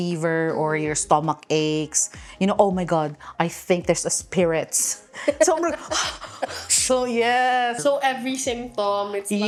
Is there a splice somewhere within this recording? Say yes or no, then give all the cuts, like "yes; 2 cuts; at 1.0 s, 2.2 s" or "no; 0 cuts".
no; 0 cuts